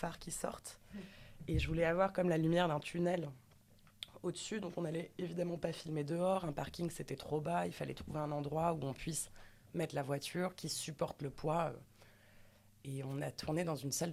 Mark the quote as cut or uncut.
uncut